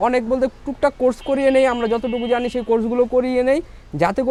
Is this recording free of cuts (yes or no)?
yes